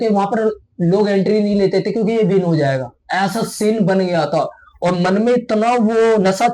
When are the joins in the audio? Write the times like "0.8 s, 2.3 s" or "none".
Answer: none